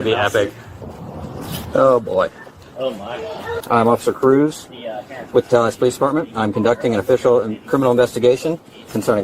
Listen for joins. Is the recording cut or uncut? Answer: cut